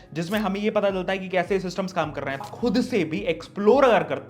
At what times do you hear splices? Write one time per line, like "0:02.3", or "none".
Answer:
0:02.5